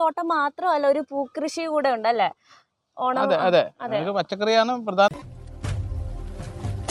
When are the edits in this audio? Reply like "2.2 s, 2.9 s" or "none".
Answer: 5.1 s